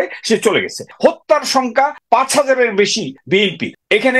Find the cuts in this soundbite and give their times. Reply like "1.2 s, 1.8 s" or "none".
0.9 s, 2.0 s, 3.2 s